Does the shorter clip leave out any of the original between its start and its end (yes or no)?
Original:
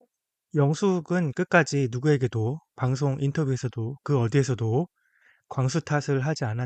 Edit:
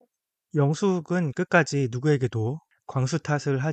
yes